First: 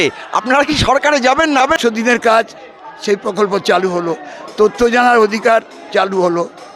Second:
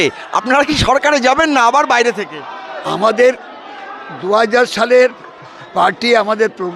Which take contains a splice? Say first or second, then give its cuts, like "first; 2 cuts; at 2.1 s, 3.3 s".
first; 1 cut; at 1.6 s